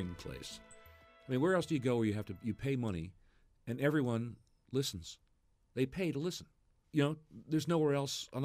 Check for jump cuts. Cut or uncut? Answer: uncut